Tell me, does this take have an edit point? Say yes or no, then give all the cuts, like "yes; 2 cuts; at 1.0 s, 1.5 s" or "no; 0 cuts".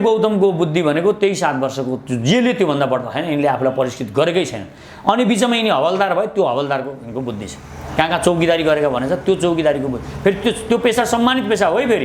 no; 0 cuts